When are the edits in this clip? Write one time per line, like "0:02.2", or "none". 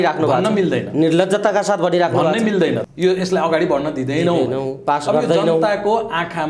0:02.8